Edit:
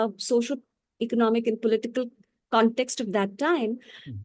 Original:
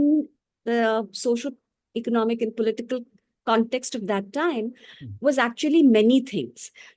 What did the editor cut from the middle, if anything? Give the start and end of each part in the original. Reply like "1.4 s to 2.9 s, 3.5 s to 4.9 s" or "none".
none